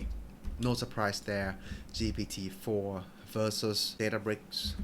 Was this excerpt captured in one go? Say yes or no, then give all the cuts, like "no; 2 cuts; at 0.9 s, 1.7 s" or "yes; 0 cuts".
no; 1 cut; at 3.9 s